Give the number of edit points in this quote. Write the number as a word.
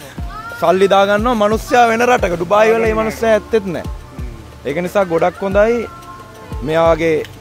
zero